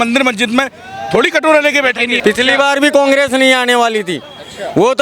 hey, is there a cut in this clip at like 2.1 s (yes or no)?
yes